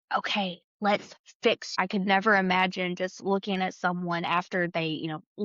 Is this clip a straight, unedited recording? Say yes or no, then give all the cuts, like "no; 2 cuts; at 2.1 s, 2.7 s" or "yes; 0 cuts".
no; 1 cut; at 1.8 s